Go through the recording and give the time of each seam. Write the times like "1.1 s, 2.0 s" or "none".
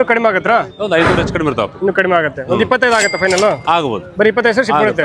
none